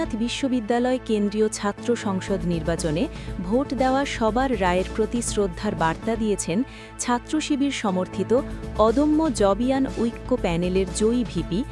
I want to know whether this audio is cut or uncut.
uncut